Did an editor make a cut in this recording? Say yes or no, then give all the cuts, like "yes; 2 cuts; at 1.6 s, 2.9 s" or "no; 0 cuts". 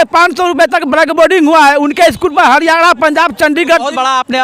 no; 0 cuts